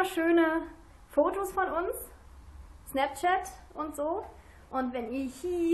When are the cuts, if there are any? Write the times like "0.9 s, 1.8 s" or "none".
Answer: 1.6 s